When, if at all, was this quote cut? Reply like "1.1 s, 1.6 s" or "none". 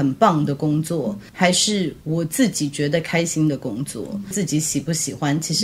1.2 s, 4.3 s